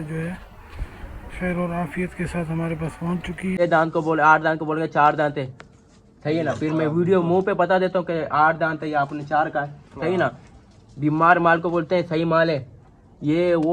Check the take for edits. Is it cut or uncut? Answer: cut